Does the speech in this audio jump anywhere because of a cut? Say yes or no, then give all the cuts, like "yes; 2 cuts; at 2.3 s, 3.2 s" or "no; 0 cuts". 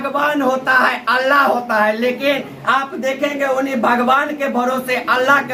no; 0 cuts